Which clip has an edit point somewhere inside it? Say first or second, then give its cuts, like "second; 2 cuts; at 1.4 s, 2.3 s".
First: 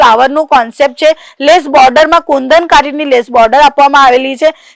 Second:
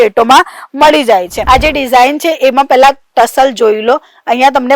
second; 1 cut; at 1.3 s